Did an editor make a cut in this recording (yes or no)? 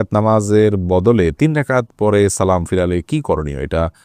no